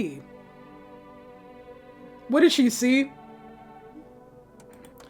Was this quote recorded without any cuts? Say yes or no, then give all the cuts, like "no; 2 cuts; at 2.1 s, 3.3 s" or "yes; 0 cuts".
yes; 0 cuts